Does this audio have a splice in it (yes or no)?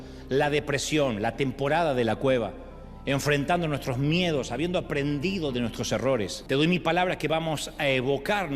yes